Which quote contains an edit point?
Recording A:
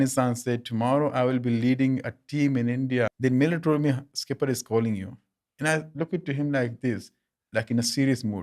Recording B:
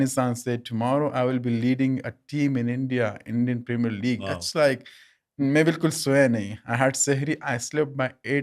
A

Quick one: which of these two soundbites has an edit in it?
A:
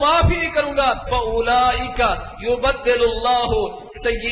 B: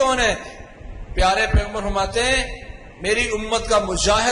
A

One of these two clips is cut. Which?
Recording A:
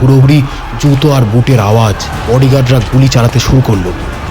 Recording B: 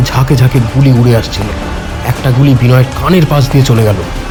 A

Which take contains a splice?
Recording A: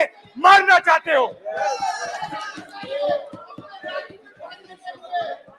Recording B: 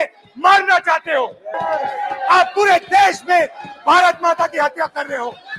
B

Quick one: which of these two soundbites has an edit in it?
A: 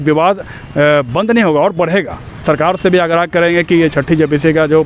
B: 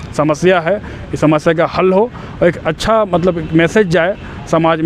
A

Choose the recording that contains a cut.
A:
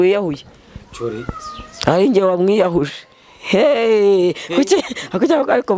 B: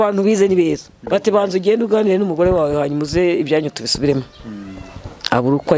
B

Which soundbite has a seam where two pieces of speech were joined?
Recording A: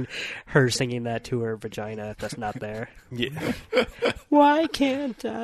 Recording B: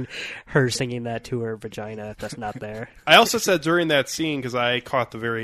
B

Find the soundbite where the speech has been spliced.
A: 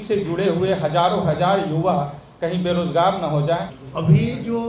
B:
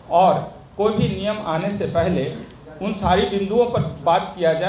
A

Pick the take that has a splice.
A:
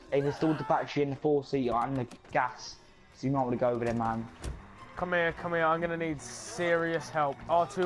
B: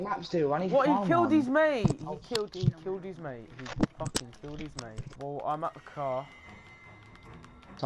B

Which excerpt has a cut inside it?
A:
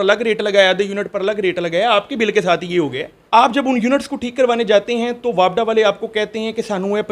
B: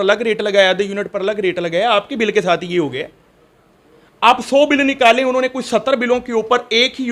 A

